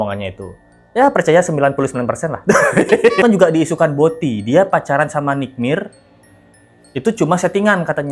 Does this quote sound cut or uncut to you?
cut